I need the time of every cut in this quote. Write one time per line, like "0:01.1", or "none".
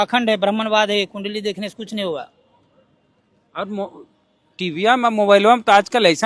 none